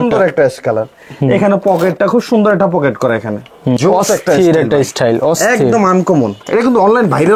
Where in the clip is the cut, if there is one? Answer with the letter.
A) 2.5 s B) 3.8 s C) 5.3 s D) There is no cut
B